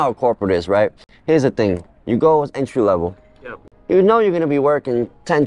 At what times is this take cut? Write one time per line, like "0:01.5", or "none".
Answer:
none